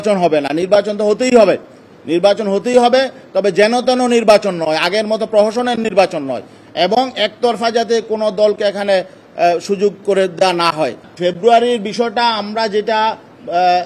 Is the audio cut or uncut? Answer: uncut